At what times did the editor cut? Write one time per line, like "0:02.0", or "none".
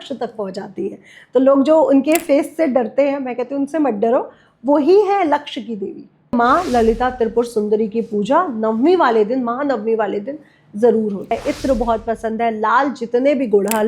0:06.3
0:11.3